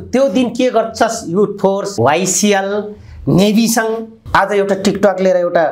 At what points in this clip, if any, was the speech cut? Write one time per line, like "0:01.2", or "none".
0:01.9
0:04.2